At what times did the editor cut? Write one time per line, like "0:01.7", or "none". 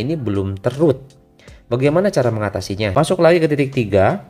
0:02.9

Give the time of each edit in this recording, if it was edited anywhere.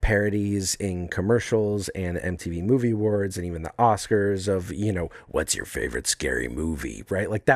none

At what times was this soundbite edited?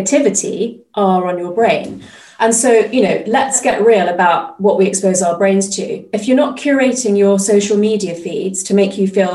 0:03.6

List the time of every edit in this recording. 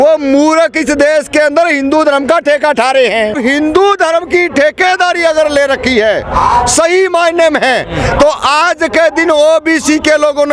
0:03.4

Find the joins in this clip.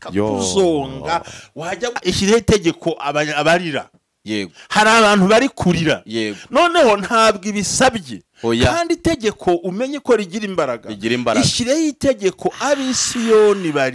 0:01.9

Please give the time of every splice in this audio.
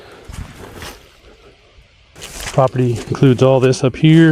0:02.1

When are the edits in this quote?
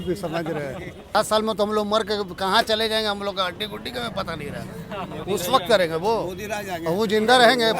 0:01.1

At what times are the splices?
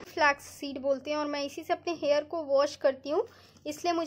none

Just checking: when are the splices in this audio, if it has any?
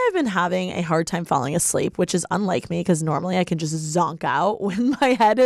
none

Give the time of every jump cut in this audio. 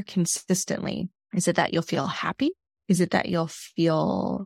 0:01.2
0:02.7

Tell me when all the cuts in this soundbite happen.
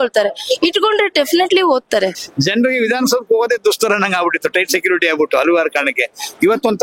0:02.2

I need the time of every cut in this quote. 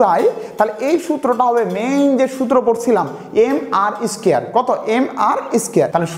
none

